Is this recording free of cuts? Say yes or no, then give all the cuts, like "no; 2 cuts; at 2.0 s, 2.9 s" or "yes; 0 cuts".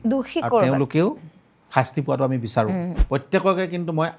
no; 1 cut; at 2.9 s